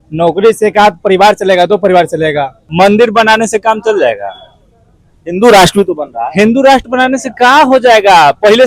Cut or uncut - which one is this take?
cut